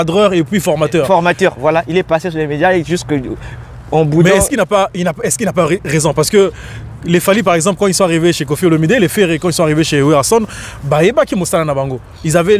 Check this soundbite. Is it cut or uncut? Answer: uncut